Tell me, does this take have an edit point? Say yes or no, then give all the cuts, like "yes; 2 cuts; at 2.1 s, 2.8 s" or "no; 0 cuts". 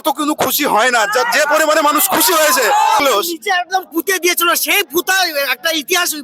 yes; 1 cut; at 3.0 s